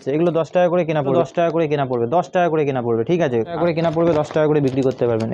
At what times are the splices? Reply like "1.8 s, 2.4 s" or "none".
1.2 s, 3.5 s